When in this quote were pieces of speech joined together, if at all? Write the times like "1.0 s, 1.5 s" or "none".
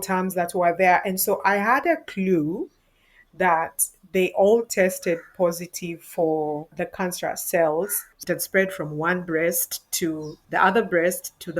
6.7 s, 8.1 s, 10.3 s